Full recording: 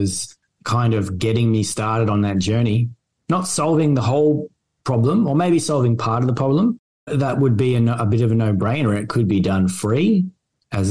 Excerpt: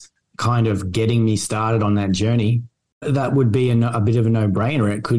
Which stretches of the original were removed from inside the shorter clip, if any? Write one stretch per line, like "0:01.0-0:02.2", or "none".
0:03.1-0:06.9